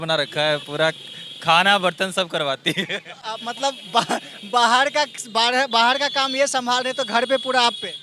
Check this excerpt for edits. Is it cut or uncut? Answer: uncut